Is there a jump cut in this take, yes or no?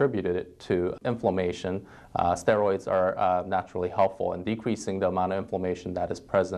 yes